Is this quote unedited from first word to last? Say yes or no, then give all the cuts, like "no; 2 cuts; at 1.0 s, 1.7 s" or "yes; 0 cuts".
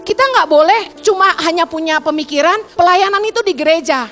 no; 2 cuts; at 0.9 s, 2.7 s